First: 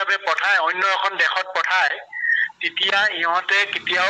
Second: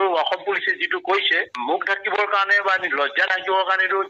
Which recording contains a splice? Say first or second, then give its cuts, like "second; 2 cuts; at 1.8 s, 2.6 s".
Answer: second; 1 cut; at 1.5 s